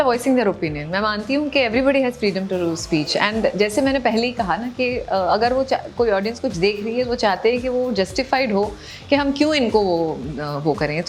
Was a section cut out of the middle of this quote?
no; 0 cuts

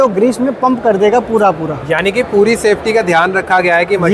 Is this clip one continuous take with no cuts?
yes; 0 cuts

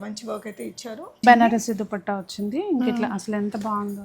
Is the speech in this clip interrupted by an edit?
yes; 1 cut; at 1.2 s

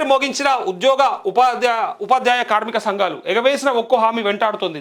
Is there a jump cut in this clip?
no; 0 cuts

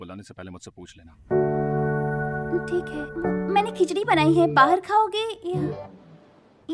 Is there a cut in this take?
yes; 2 cuts; at 1.1 s, 3.5 s

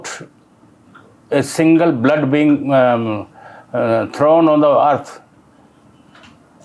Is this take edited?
no; 0 cuts

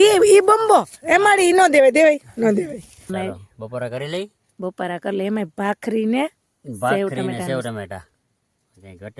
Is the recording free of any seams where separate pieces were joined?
no; 1 cut; at 3.1 s

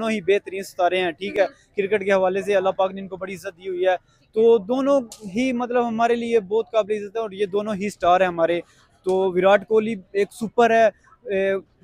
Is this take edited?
no; 0 cuts

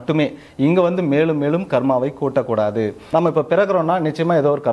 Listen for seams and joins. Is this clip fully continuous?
no; 1 cut; at 3.0 s

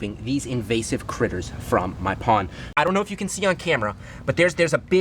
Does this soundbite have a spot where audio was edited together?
yes; 1 cut; at 2.8 s

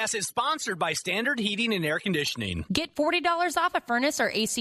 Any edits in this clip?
yes; 1 cut; at 2.6 s

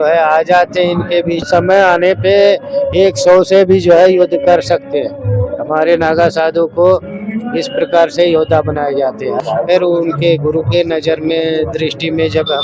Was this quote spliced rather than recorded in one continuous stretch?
yes; 2 cuts; at 1.5 s, 9.4 s

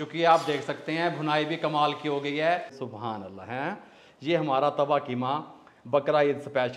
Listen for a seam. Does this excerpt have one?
yes; 1 cut; at 2.8 s

